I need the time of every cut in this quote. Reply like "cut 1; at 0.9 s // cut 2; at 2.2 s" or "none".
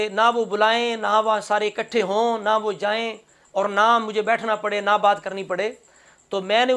none